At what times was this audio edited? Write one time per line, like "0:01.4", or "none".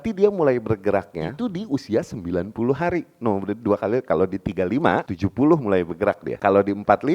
0:01.2
0:05.1
0:06.3